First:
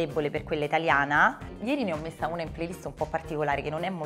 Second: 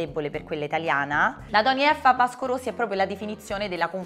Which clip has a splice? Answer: second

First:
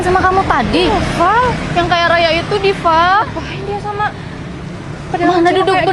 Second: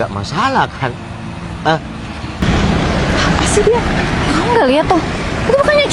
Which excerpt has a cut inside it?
second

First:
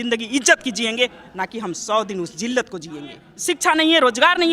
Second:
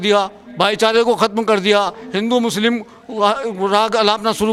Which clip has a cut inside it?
first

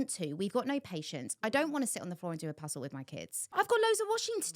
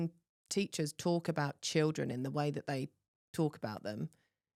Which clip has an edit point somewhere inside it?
first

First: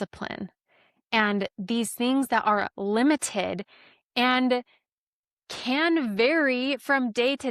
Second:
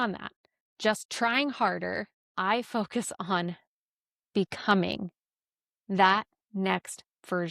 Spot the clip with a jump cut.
second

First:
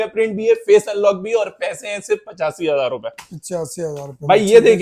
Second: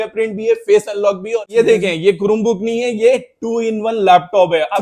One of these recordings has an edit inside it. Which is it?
second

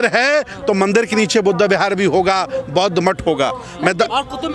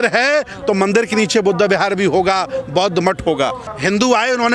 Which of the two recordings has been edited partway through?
second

